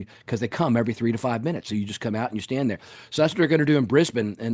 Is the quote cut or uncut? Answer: uncut